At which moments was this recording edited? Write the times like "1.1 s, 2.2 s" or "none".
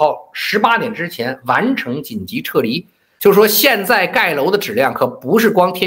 3.0 s